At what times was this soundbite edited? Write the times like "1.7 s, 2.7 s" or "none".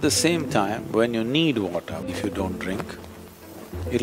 2.1 s